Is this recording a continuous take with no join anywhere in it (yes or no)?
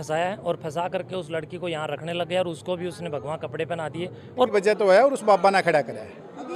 no